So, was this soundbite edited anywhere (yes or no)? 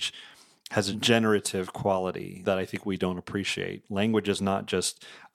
yes